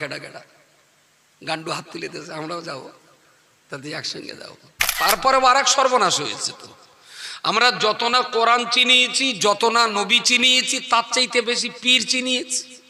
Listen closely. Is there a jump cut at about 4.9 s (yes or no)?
yes